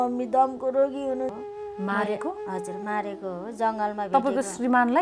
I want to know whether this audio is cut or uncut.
cut